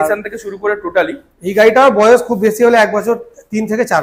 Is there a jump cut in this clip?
no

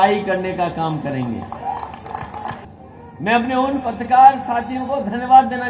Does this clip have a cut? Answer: yes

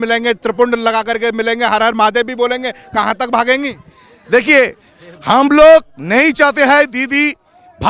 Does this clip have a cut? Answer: no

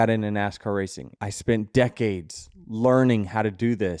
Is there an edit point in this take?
yes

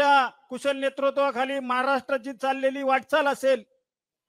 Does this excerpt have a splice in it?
no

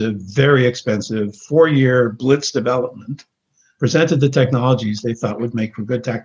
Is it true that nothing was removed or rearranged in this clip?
yes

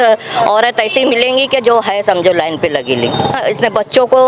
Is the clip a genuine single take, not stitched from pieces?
no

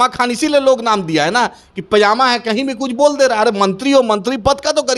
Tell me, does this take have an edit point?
no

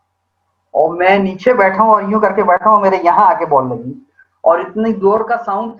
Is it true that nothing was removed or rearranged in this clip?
yes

